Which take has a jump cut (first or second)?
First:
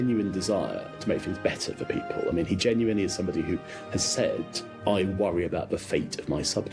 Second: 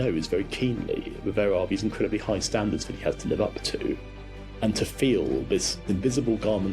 second